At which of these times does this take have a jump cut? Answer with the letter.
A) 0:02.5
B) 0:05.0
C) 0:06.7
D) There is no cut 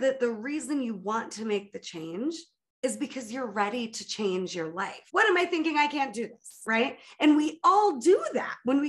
B